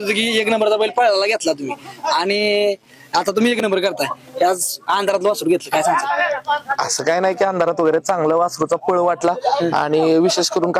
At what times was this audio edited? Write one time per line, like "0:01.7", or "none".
none